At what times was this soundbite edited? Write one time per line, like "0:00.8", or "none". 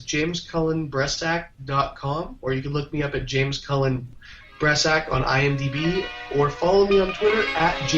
none